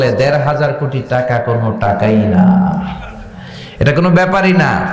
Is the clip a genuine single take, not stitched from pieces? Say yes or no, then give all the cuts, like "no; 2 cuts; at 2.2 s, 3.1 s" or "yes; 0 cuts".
yes; 0 cuts